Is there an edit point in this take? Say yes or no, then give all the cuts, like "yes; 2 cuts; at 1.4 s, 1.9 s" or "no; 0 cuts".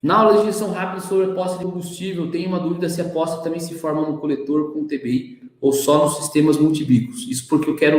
no; 0 cuts